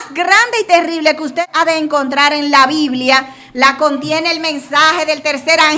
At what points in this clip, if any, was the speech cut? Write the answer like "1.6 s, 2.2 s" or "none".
1.4 s

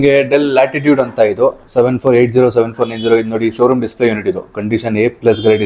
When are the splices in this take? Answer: none

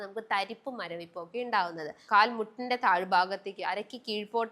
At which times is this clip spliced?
2.0 s

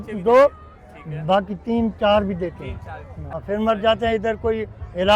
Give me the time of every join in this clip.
3.4 s

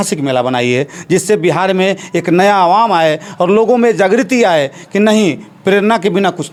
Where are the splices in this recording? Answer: none

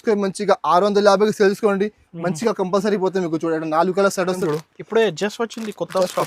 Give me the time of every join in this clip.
4.4 s

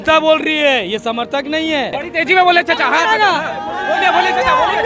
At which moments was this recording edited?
2.0 s

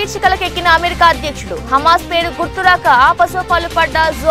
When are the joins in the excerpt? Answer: none

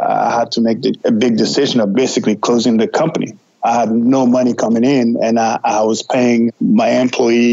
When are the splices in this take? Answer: 1.9 s

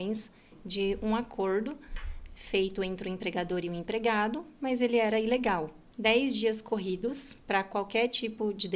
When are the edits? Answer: 5.8 s

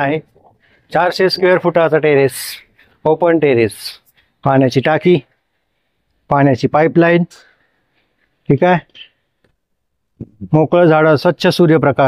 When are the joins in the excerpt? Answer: none

